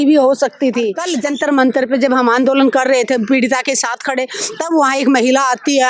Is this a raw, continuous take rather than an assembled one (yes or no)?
no